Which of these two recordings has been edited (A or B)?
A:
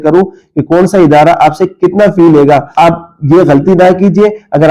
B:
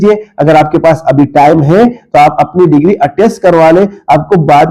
A